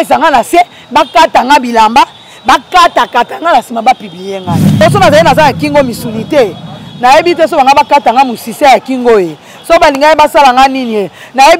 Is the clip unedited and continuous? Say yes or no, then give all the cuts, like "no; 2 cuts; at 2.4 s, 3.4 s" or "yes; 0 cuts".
no; 1 cut; at 4.6 s